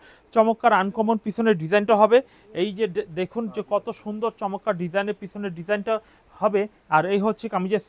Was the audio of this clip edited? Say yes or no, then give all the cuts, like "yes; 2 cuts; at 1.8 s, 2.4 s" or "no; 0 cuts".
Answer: no; 0 cuts